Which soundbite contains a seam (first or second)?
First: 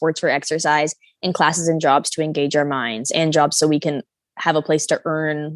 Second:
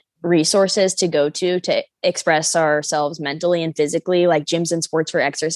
second